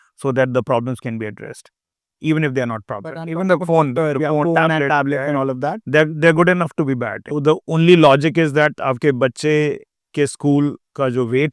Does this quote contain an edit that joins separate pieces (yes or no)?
yes